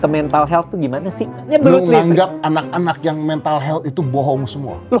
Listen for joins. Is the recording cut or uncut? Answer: cut